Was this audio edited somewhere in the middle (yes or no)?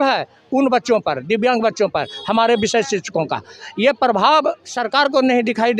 yes